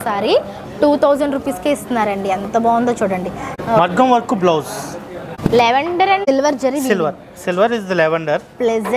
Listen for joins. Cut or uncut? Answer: cut